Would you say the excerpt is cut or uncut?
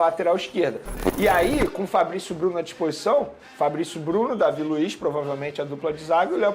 cut